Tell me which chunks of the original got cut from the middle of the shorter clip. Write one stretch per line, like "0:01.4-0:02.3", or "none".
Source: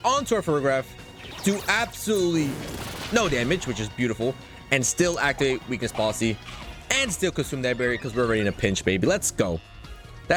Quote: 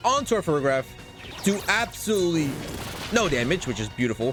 none